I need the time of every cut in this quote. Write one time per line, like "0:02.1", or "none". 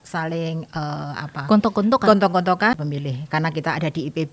0:02.8